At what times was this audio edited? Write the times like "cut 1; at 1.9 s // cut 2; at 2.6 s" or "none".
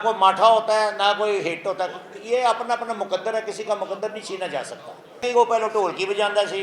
cut 1; at 5.2 s